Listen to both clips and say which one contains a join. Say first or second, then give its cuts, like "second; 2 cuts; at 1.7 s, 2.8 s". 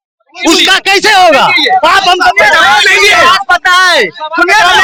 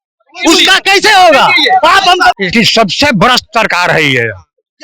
second; 1 cut; at 2.4 s